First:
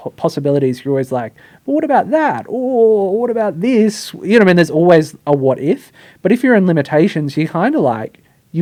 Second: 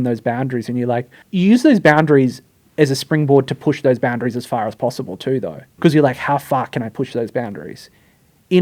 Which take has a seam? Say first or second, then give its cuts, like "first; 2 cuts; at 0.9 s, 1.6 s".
second; 2 cuts; at 1.2 s, 5.7 s